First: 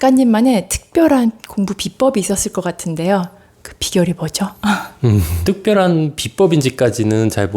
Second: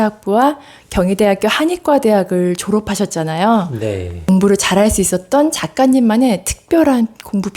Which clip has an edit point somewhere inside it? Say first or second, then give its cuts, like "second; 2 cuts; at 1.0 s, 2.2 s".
first; 1 cut; at 5.4 s